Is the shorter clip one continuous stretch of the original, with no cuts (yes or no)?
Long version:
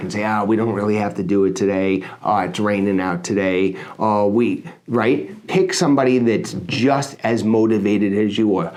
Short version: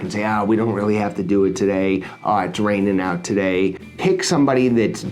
no